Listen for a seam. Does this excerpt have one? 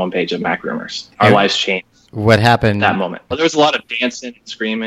yes; 2 cuts; at 1.0 s, 3.2 s

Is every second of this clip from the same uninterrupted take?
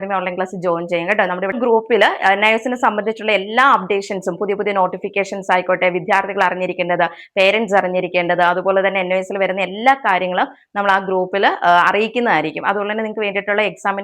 no; 1 cut; at 1.5 s

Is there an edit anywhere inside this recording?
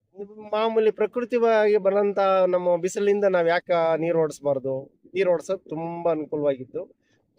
no; 0 cuts

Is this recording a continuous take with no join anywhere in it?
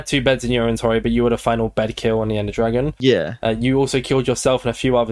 yes; 0 cuts

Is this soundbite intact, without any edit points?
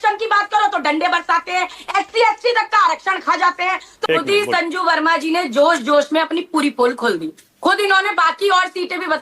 no; 1 cut; at 3.9 s

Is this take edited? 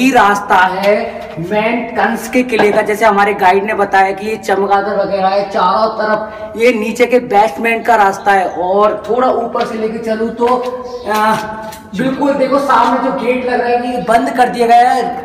no; 0 cuts

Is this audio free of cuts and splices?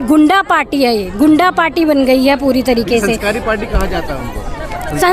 yes; 0 cuts

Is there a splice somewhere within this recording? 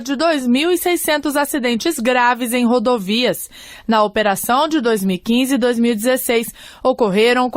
no; 0 cuts

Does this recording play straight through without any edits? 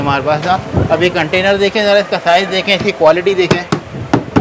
yes; 0 cuts

